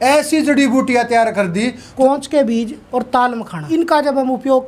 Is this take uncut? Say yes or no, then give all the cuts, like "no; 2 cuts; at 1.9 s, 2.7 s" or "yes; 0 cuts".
no; 3 cuts; at 1.9 s, 2.8 s, 3.6 s